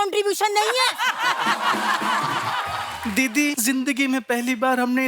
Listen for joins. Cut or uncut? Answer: cut